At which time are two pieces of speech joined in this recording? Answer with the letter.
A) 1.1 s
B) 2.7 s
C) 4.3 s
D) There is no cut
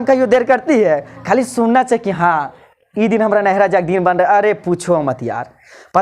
A